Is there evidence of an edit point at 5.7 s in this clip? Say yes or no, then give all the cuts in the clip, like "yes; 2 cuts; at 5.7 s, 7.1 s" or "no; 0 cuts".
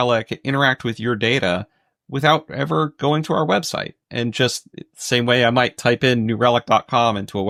no; 0 cuts